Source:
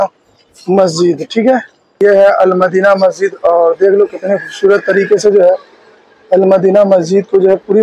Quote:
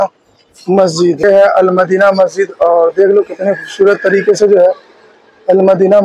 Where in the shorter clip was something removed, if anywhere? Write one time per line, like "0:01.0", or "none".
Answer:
0:01.2